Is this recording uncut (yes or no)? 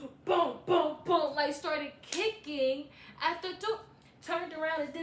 yes